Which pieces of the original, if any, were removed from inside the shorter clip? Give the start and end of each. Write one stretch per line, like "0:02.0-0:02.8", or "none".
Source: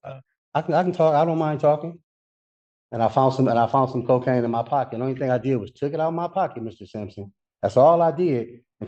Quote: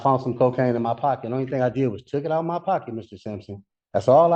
none